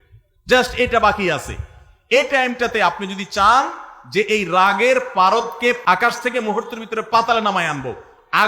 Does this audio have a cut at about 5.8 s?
yes; 1 cut; at 5.8 s

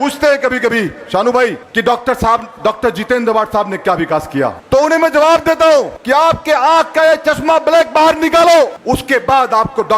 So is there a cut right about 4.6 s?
yes; 4 cuts; at 1.6 s, 4.6 s, 6.0 s, 8.8 s

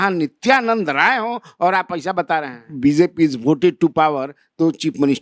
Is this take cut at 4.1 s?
no; 1 cut; at 2.7 s

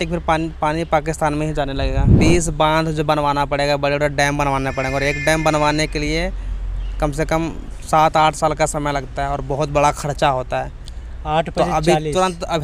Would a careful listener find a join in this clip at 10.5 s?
no; 1 cut; at 2.1 s

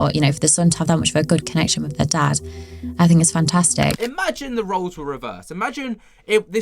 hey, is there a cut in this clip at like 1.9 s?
no; 1 cut; at 4.0 s

